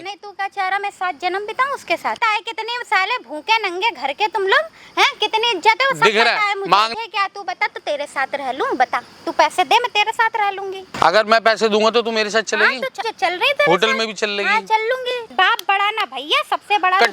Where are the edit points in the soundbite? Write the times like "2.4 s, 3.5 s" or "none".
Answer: 2.2 s, 6.9 s, 10.9 s, 13.0 s, 15.3 s